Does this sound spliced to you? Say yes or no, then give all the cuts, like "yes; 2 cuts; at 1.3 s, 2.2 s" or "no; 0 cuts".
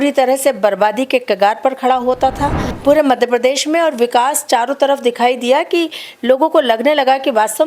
yes; 1 cut; at 2.7 s